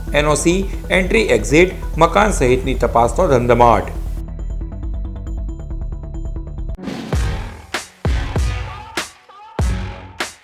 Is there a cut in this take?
yes; 1 cut; at 6.7 s

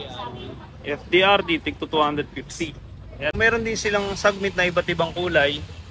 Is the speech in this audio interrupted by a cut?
yes; 1 cut; at 3.4 s

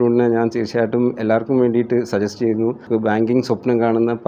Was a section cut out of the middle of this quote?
yes; 1 cut; at 2.8 s

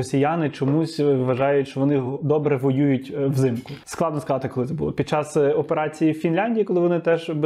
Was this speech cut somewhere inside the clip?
no; 0 cuts

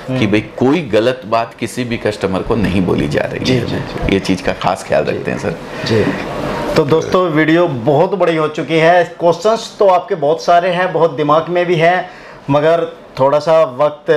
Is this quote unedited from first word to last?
yes; 0 cuts

